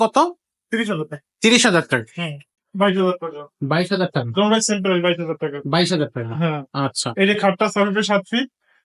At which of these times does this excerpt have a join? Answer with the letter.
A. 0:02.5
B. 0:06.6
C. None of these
A